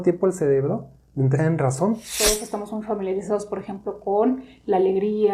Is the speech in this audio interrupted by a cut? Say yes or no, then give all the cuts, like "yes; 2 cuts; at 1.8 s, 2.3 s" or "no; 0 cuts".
yes; 1 cut; at 2.1 s